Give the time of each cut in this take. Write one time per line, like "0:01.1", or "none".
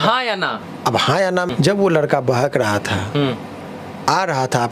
0:01.5